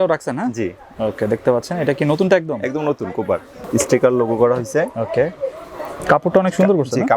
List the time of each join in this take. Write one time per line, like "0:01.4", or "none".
0:03.6